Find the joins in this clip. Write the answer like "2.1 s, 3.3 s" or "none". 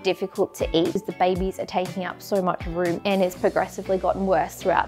1.1 s, 3.0 s